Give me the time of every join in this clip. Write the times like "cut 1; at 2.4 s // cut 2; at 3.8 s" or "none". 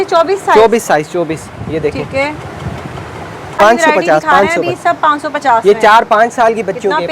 cut 1; at 3.6 s